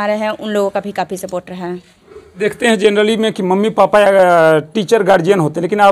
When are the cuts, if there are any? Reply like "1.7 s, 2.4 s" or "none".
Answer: none